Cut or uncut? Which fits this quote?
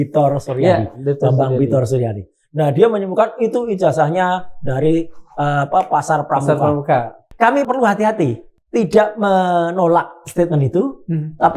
cut